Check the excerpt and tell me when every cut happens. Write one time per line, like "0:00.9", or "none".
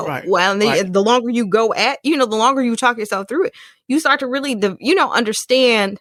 none